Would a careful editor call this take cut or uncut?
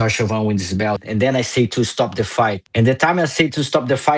cut